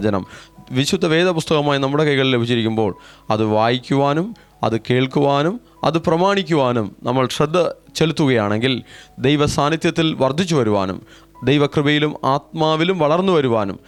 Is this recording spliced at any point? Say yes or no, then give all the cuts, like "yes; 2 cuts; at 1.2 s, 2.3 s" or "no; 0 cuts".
no; 0 cuts